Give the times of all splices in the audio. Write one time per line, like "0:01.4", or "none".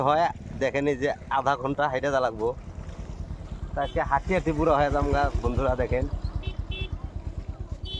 none